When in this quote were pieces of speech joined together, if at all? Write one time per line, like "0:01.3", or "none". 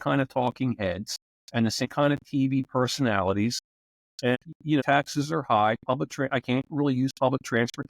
0:01.9
0:04.8